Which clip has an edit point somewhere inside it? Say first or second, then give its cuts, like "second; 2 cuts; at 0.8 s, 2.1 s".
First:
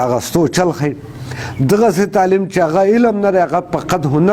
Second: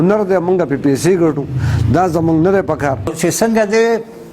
second; 1 cut; at 3.1 s